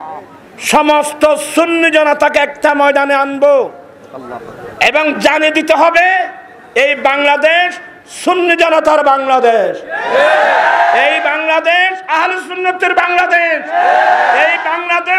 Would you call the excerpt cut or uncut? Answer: uncut